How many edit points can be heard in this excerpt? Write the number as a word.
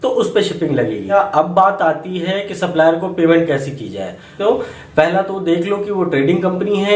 two